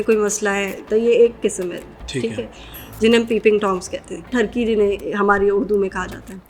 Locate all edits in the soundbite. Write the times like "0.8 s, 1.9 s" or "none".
0.8 s, 4.3 s

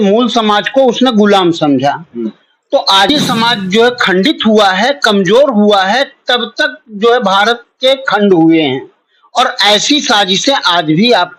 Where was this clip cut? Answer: 3.1 s

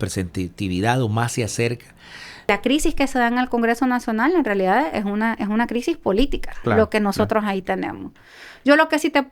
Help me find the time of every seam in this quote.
2.5 s

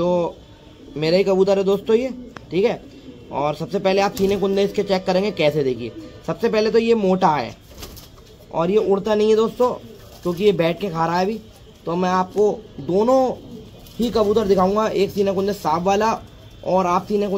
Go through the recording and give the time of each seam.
none

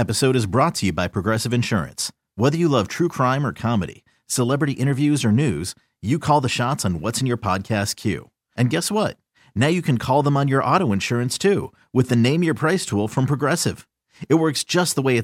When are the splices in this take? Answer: none

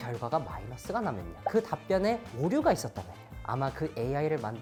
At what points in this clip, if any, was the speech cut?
none

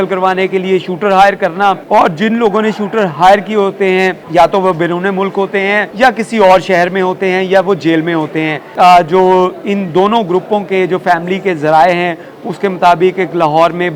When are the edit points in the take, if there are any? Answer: 1.8 s, 4.2 s, 5.9 s, 8.6 s

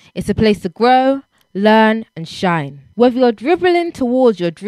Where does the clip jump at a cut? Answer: none

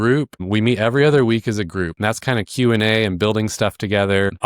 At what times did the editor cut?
1.9 s

